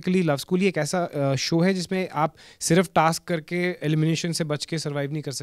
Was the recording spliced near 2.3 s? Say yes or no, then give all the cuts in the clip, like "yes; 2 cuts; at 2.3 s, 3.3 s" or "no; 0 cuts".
no; 0 cuts